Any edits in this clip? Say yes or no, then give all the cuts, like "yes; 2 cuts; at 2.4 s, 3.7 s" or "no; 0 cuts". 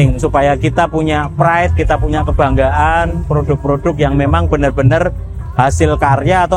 no; 0 cuts